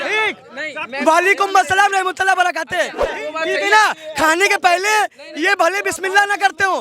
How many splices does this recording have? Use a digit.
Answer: 1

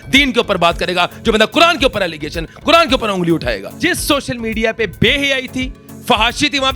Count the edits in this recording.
1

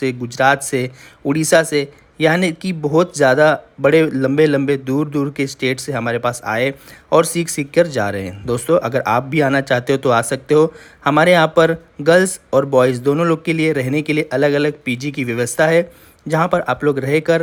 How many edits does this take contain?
0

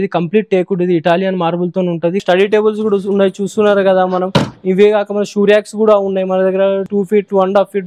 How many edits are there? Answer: 2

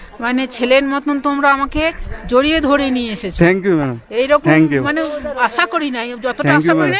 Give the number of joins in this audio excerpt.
0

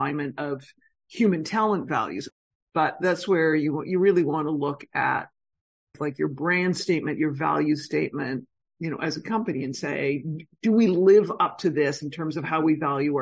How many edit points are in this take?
1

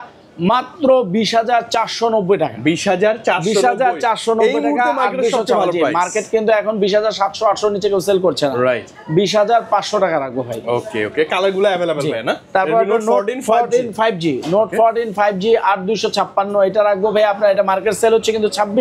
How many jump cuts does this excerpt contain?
0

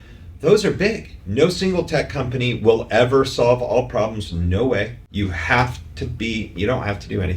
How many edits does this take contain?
2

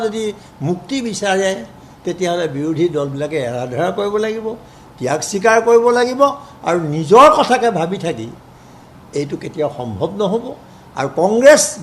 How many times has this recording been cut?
0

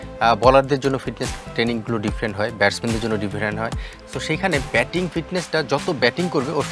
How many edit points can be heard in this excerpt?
0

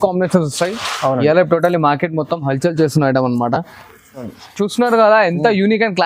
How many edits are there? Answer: 1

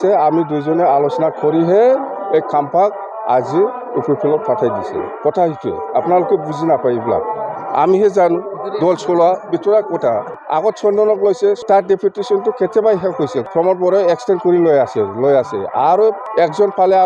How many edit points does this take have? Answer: 4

